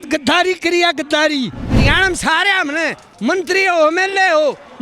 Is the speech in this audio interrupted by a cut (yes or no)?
yes